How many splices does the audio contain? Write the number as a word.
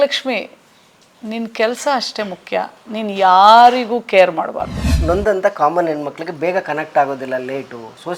one